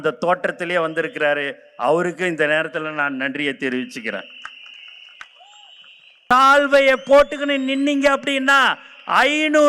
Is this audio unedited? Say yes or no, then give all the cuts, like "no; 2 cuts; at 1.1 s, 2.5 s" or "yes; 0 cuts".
no; 1 cut; at 6.3 s